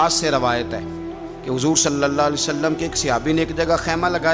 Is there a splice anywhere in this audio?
no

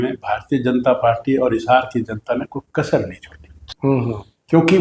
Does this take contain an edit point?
yes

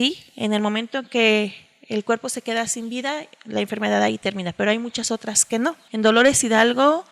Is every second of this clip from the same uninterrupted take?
no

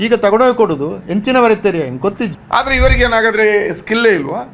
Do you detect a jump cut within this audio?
yes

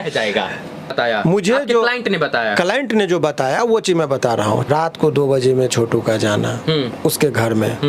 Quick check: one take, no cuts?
no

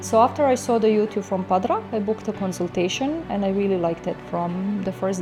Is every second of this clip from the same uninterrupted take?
yes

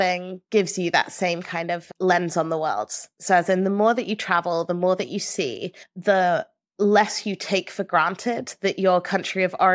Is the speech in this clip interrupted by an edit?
no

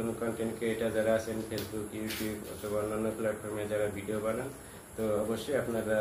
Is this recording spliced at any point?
no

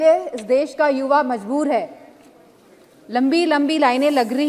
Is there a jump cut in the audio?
no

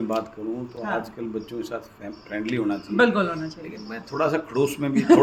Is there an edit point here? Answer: no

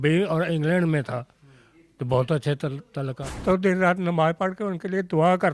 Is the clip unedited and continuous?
no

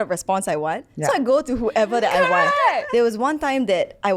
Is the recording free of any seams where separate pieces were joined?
no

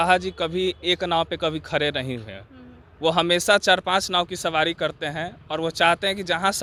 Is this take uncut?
yes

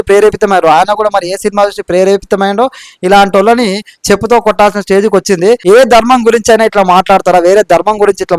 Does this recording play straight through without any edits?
no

